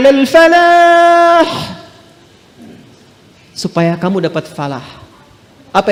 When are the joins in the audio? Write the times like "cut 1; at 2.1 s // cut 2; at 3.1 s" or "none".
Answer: none